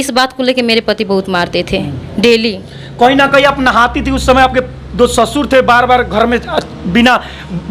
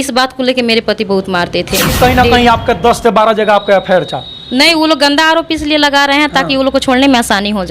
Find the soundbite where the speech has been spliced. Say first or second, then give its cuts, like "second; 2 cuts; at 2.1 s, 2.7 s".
second; 1 cut; at 1.9 s